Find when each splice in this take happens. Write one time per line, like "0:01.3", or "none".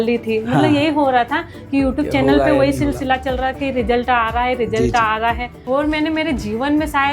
0:05.5